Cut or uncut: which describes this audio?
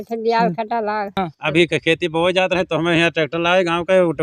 cut